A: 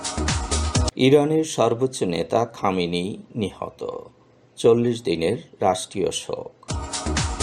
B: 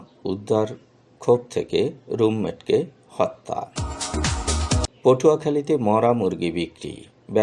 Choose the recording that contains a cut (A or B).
A